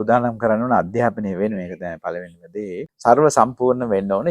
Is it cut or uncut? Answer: cut